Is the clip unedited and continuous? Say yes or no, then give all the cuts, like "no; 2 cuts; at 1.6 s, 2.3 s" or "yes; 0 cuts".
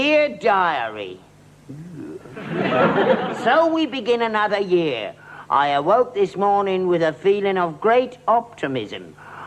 yes; 0 cuts